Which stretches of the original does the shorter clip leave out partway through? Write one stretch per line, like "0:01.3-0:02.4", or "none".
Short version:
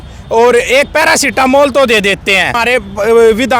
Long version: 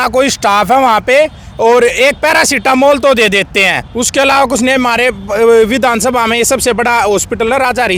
0:03.9-0:04.9